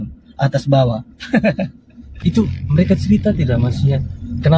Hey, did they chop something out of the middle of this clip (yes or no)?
yes